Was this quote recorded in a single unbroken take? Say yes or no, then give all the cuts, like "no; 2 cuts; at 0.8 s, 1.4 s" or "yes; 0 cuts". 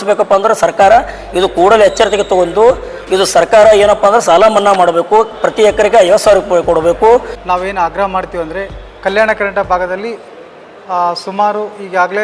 no; 1 cut; at 7.4 s